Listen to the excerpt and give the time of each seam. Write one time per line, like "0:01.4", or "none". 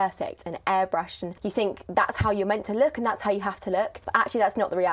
0:01.2
0:04.0